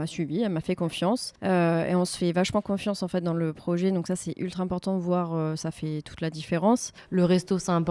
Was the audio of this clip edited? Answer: yes; 2 cuts; at 1.3 s, 6.9 s

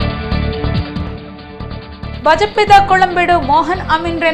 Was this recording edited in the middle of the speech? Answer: yes; 1 cut; at 1.1 s

